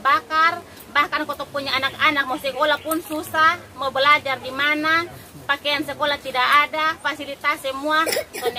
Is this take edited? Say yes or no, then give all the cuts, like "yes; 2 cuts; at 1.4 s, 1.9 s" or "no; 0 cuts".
no; 0 cuts